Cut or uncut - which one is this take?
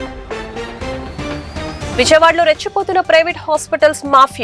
uncut